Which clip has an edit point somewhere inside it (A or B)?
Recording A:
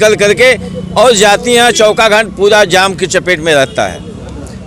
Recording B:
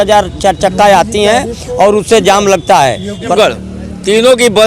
B